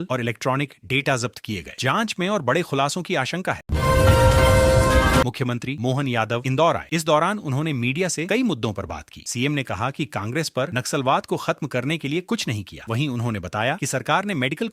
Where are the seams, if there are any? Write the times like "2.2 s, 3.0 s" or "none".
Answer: 3.6 s, 5.3 s